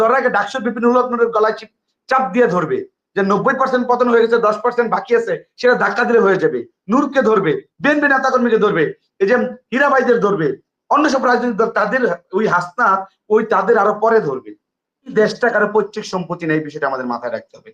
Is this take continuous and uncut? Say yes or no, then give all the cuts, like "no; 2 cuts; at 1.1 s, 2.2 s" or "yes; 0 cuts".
no; 1 cut; at 15.1 s